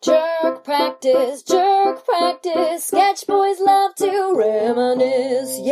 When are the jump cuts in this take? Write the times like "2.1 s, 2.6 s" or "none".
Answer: none